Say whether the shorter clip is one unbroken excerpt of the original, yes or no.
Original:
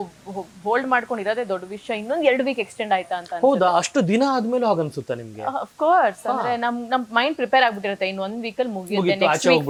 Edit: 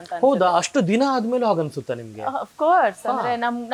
yes